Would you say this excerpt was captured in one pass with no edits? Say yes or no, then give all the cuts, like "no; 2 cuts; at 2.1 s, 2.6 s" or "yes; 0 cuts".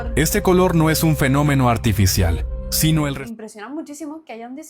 no; 1 cut; at 3.2 s